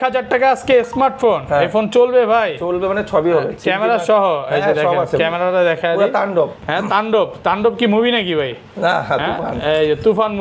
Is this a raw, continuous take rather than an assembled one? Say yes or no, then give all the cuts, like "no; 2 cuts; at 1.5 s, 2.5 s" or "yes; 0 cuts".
yes; 0 cuts